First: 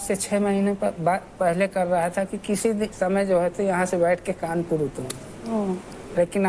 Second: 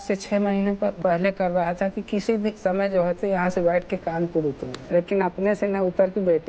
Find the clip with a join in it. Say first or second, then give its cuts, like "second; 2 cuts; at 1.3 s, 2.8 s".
second; 2 cuts; at 1.0 s, 4.7 s